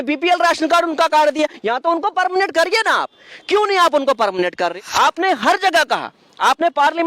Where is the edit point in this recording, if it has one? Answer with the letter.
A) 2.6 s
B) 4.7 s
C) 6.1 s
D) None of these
B